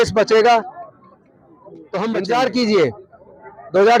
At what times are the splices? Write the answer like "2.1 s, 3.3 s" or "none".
2.2 s

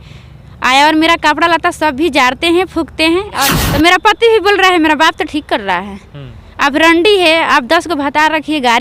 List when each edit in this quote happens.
3.5 s

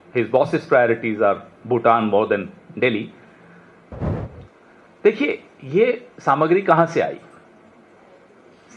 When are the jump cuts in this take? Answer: 4.1 s

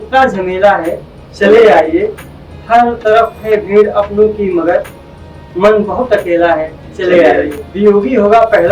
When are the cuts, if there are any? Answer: 7.7 s

